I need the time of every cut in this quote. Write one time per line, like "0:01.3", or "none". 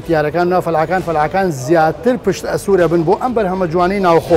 none

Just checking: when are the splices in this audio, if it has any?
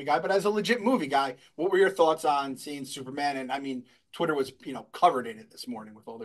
none

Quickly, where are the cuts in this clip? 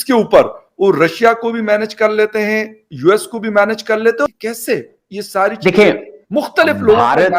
0:04.3

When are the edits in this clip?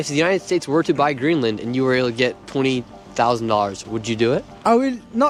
none

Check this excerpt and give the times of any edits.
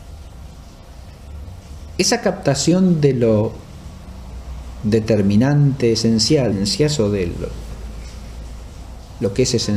none

